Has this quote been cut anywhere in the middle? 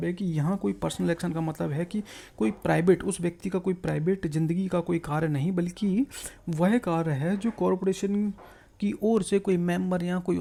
no; 0 cuts

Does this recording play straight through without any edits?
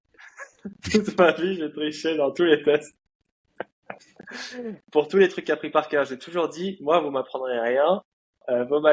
yes; 0 cuts

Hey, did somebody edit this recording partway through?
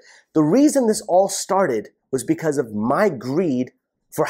no; 0 cuts

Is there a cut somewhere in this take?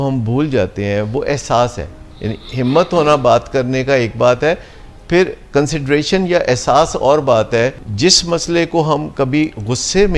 yes; 1 cut; at 7.8 s

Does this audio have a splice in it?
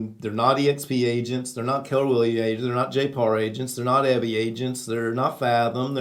no; 0 cuts

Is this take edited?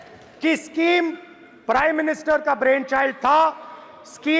no; 0 cuts

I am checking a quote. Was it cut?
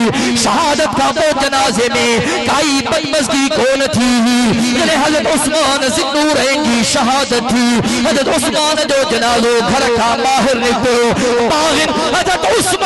no; 0 cuts

